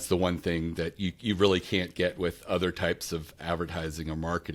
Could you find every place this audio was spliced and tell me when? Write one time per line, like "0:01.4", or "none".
none